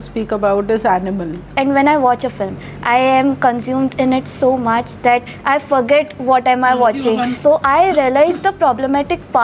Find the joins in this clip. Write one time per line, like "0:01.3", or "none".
0:01.5
0:07.3